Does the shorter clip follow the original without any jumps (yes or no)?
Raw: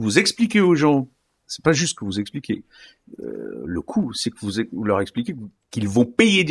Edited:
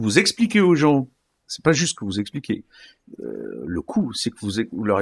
yes